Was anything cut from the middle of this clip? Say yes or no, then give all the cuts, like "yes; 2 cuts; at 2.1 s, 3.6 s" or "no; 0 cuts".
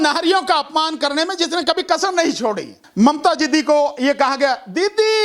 yes; 1 cut; at 2.8 s